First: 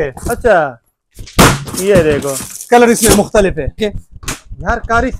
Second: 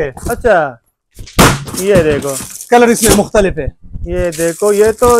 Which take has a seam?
first; 1 cut; at 3.8 s

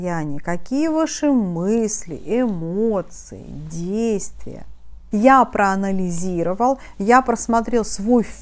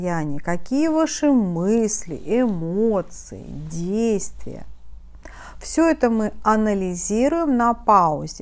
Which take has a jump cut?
first; 1 cut; at 4.9 s

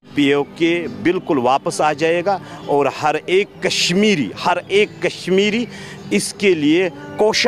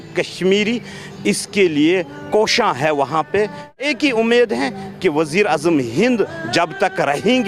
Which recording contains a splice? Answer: second; 1 cut; at 3.8 s

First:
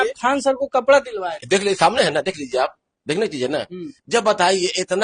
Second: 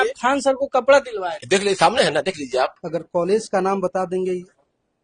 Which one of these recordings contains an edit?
second; 1 cut; at 2.8 s

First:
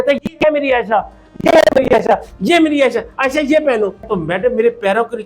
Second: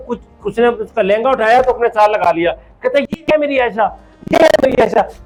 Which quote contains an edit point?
first; 1 cut; at 4.0 s

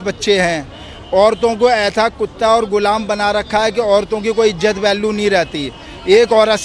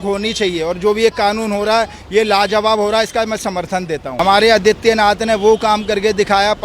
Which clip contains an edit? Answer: second; 1 cut; at 4.1 s

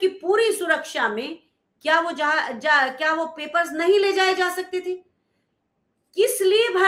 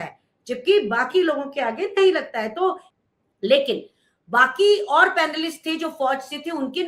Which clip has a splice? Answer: second; 1 cut; at 2.9 s

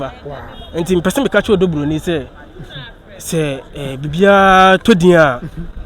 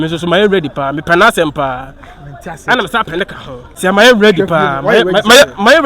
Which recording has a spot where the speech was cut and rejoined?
second; 1 cut; at 3.6 s

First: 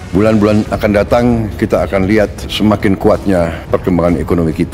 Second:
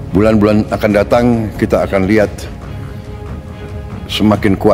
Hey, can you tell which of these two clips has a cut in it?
first; 2 cuts; at 2.4 s, 3.6 s

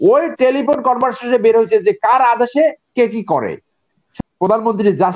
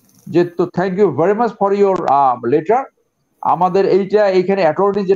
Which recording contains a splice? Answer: first; 1 cut; at 4.0 s

